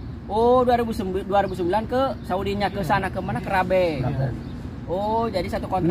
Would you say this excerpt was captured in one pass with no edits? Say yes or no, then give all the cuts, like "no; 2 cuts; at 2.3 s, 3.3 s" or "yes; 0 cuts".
yes; 0 cuts